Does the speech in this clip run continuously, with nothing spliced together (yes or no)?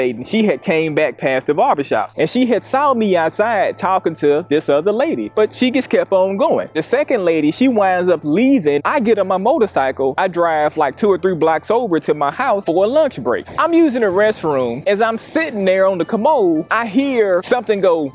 yes